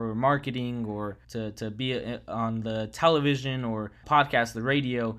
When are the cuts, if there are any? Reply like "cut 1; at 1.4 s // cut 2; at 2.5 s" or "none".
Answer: cut 1; at 1.2 s // cut 2; at 4.0 s